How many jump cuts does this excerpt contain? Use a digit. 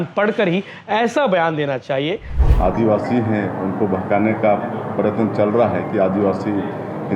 1